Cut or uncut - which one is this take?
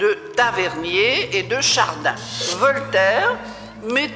cut